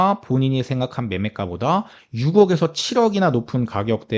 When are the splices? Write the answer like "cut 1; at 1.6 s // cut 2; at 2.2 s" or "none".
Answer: none